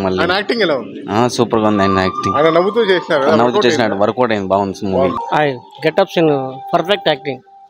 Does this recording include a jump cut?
yes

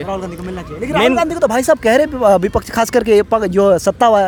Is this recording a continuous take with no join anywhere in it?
yes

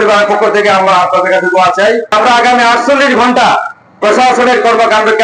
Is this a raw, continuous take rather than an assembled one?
no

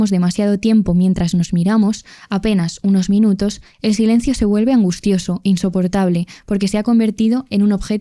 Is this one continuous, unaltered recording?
yes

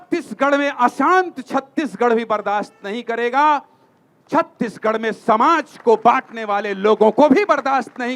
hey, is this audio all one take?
yes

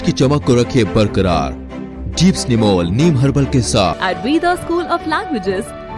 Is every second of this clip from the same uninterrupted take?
no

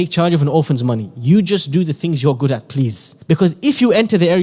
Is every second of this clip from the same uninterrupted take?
no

